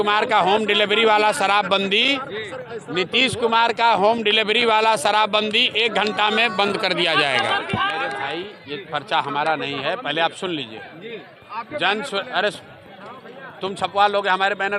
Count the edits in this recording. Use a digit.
1